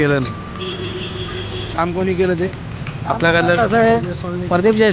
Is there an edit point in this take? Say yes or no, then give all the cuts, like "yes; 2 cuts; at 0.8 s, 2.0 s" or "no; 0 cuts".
yes; 1 cut; at 1.7 s